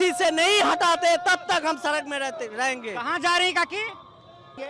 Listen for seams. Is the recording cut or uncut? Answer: uncut